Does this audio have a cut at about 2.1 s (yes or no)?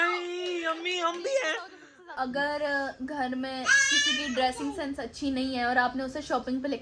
yes